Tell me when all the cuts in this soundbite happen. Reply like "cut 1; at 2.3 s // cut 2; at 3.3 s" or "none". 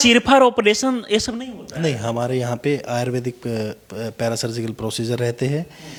none